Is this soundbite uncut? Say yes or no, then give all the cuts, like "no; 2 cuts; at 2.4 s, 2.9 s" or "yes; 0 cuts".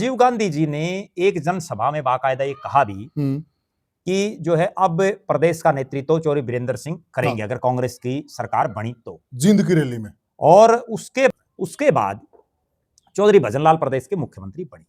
no; 1 cut; at 11.3 s